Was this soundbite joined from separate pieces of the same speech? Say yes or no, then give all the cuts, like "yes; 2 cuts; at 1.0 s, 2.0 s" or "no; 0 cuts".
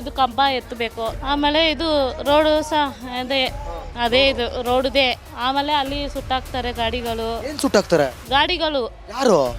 yes; 2 cuts; at 1.1 s, 5.3 s